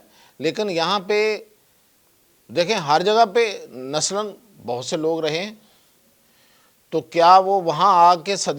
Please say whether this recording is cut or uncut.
uncut